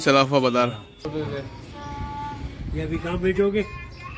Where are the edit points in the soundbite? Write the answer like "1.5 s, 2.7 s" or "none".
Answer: 1.1 s